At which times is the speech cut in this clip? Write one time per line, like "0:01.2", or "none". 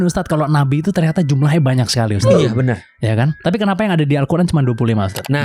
0:03.4

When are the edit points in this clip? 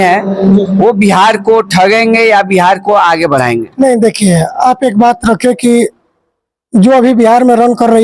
none

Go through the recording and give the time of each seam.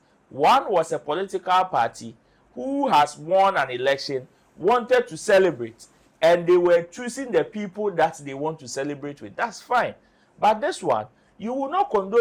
none

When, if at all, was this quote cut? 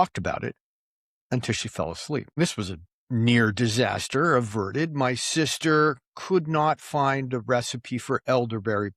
0:02.4

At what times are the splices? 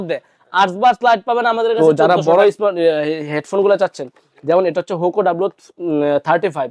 0:02.0

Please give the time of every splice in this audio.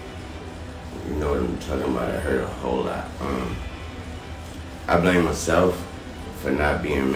none

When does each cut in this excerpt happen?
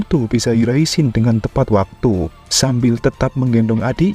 0:02.4

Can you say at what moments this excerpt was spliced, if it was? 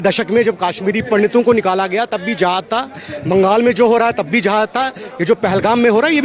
none

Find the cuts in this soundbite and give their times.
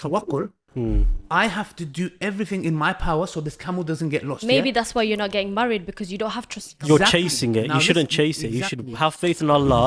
none

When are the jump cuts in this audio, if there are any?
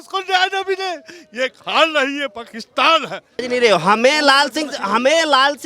0:03.3

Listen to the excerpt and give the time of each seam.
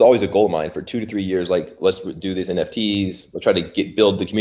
none

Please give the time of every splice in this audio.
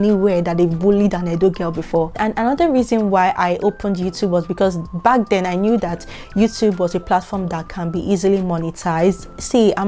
none

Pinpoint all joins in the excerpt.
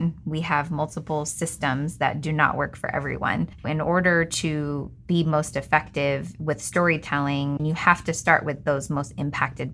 0:03.6
0:07.6

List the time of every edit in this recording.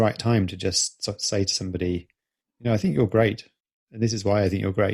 none

